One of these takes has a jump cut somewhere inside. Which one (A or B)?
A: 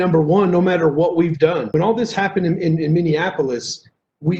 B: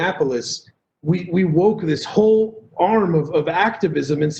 A